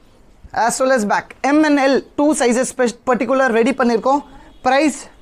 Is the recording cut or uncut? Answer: uncut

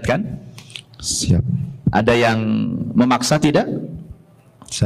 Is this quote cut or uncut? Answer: uncut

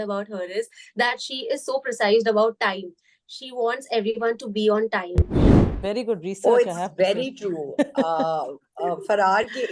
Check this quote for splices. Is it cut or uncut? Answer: cut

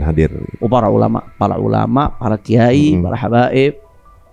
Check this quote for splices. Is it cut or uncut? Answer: uncut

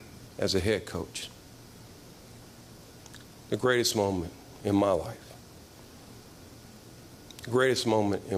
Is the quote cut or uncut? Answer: uncut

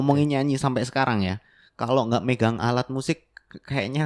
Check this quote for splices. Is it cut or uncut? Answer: uncut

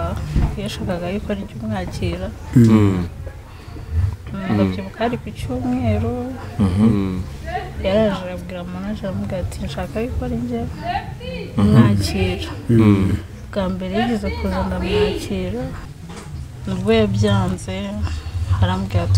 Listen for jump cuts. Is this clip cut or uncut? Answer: cut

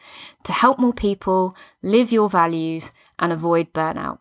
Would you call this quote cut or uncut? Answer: uncut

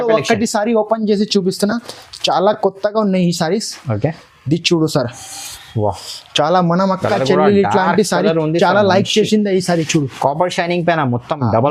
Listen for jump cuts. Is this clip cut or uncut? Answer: uncut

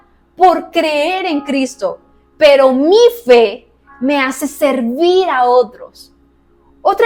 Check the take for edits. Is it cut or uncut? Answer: uncut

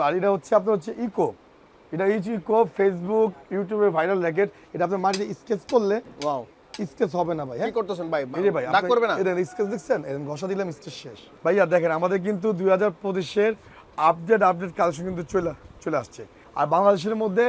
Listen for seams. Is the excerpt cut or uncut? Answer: cut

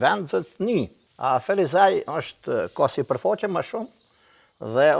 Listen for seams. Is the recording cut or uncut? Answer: cut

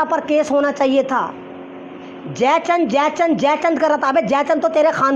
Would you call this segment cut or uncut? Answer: uncut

